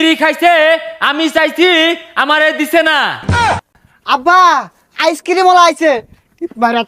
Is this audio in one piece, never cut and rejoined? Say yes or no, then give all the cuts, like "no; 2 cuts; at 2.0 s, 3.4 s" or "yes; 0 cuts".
no; 1 cut; at 3.4 s